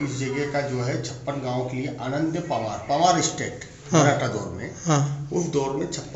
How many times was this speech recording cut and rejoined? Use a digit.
0